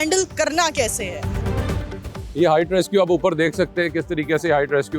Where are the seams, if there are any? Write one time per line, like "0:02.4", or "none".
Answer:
0:01.1
0:02.2

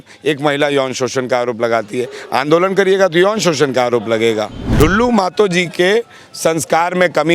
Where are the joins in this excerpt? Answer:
0:04.6

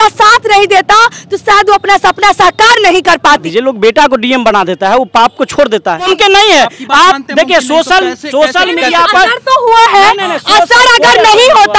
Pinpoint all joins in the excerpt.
0:03.4
0:06.1

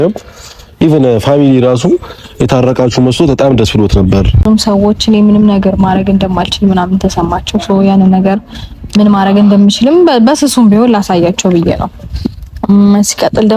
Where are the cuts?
0:04.4

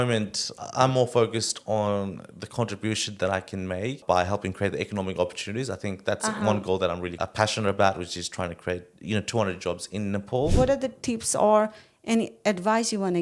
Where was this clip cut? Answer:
0:04.0
0:07.2
0:10.5

